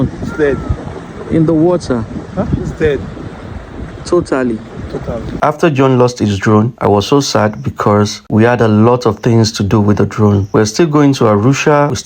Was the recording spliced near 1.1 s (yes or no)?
no